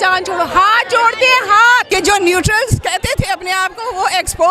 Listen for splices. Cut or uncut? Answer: cut